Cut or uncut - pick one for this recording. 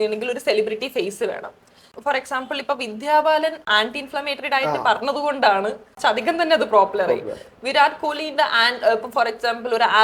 cut